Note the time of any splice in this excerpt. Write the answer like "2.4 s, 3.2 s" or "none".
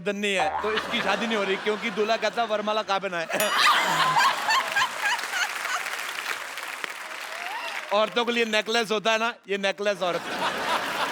none